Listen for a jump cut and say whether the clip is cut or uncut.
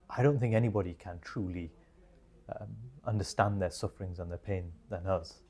uncut